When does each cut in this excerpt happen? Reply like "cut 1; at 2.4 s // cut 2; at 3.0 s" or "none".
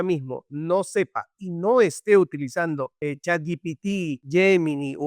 cut 1; at 2.9 s // cut 2; at 4.2 s